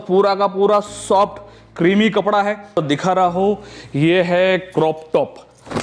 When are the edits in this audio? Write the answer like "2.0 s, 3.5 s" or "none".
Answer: 2.8 s